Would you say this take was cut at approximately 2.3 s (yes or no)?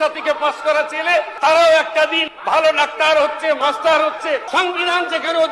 yes